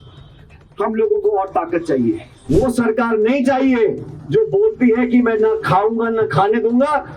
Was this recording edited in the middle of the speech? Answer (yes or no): yes